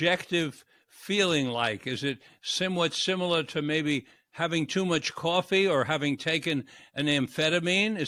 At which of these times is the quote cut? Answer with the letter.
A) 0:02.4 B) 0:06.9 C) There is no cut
C